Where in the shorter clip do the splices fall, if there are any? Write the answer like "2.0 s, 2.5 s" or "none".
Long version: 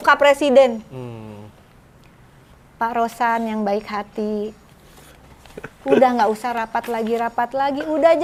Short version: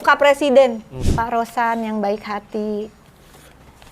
1.0 s